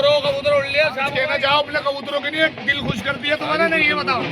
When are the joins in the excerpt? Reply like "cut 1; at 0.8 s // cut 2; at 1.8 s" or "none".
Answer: cut 1; at 1.1 s